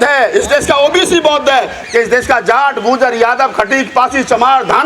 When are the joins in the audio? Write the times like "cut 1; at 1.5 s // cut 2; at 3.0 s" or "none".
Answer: cut 1; at 1.8 s